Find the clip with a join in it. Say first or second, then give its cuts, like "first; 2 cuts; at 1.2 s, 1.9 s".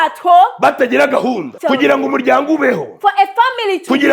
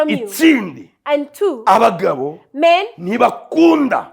first; 1 cut; at 1.5 s